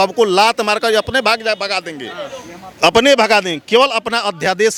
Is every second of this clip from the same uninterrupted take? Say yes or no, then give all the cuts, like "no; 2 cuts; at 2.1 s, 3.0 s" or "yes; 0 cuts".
yes; 0 cuts